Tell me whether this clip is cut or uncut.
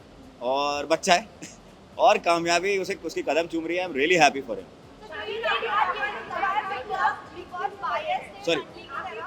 uncut